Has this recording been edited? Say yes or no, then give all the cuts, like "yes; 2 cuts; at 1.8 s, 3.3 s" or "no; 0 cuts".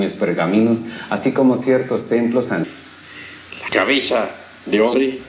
no; 0 cuts